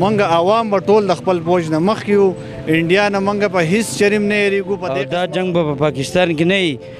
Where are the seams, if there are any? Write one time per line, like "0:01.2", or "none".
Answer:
0:04.9